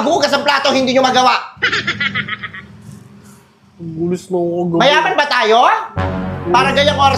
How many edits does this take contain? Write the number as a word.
zero